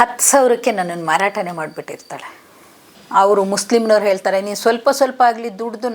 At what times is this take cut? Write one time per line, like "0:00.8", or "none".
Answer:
0:02.5